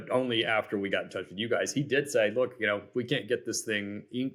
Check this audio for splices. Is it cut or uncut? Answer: uncut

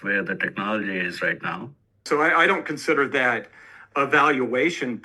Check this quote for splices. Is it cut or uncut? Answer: cut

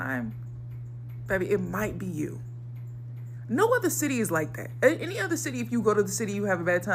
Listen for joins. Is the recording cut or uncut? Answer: uncut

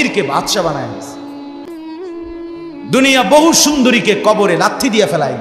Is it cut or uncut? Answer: cut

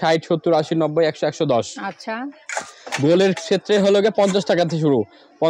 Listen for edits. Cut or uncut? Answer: uncut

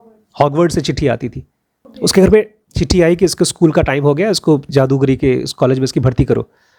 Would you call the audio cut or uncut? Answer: uncut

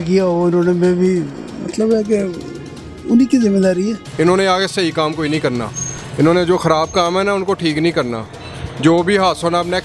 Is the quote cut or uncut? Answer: cut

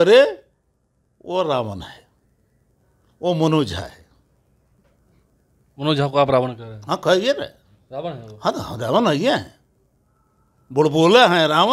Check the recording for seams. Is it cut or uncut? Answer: uncut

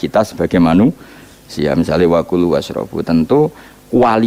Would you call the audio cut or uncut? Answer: uncut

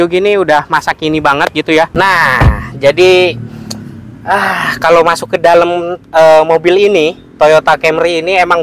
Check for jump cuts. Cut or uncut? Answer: cut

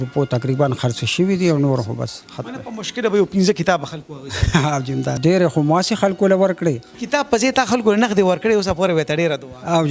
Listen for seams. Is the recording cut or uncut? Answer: cut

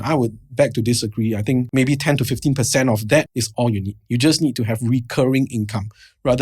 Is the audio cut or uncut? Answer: cut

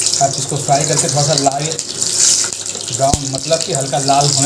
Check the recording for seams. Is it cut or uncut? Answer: uncut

